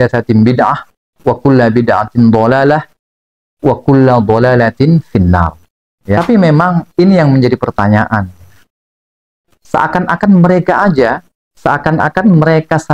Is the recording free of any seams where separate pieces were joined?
no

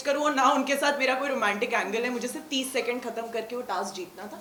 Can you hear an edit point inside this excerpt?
no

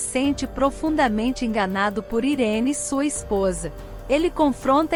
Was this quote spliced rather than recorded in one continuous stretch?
no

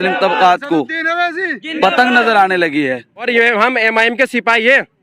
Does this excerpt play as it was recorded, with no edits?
no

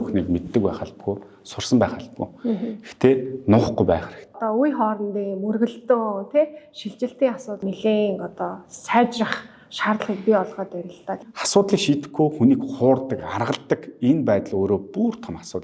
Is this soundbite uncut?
no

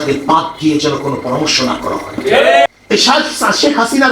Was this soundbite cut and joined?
yes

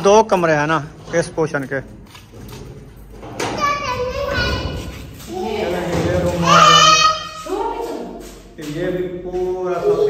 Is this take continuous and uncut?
yes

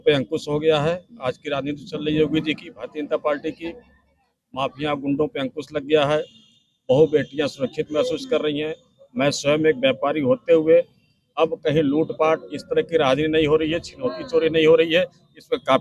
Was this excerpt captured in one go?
yes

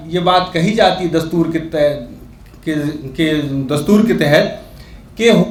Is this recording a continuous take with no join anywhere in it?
yes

